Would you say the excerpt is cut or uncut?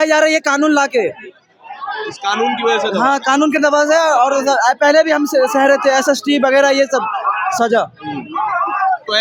uncut